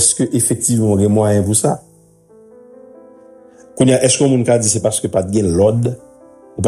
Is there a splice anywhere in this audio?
yes; 2 cuts; at 1.8 s, 3.6 s

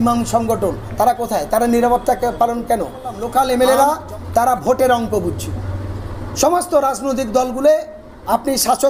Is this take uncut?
no; 1 cut; at 3.2 s

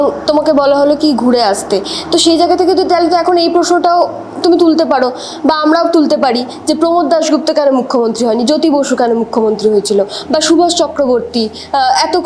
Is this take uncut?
yes; 0 cuts

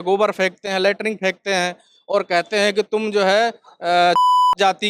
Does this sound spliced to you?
no; 0 cuts

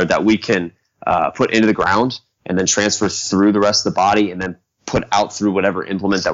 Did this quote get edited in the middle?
no; 0 cuts

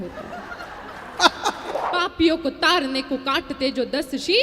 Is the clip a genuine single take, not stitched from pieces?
no; 1 cut; at 1.7 s

